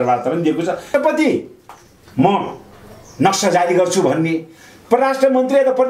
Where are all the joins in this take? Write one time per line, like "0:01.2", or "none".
0:00.9